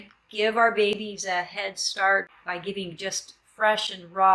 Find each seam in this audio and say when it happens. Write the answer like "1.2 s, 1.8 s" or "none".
2.3 s